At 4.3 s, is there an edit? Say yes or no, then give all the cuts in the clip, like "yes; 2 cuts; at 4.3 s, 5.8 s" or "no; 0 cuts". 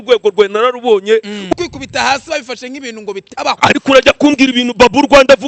no; 1 cut; at 1.5 s